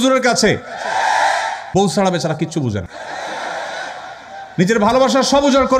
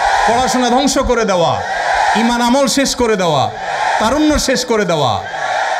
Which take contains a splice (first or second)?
first